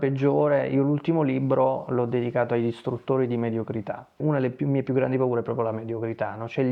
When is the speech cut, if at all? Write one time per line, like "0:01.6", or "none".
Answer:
0:04.2